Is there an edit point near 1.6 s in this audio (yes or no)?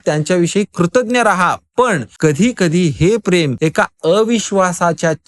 no